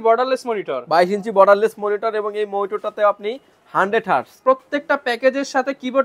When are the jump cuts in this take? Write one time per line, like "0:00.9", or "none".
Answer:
0:04.3

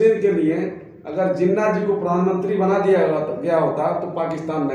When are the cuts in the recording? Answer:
none

